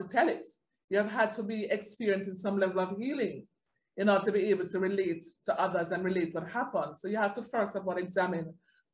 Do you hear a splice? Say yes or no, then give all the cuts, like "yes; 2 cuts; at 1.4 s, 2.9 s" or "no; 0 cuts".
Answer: no; 0 cuts